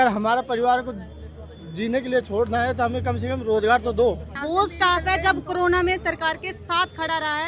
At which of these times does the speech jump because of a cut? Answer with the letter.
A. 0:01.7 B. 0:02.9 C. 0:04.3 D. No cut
C